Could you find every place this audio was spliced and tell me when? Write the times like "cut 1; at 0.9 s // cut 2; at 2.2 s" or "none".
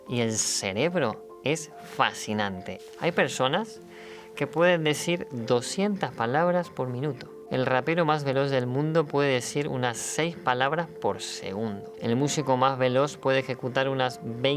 cut 1; at 2.7 s // cut 2; at 11.9 s

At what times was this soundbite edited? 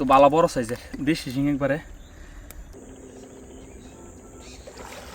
cut 1; at 2.7 s

